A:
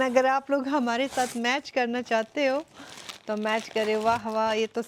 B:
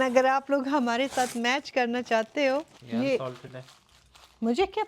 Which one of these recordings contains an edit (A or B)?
B